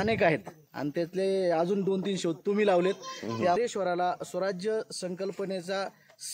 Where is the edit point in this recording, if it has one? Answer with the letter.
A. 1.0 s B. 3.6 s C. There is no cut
B